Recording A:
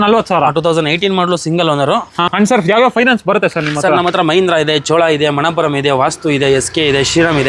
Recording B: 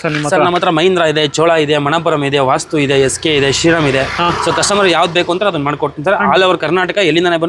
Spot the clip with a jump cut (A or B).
A